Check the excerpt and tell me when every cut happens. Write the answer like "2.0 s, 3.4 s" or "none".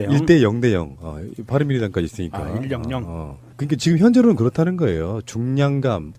none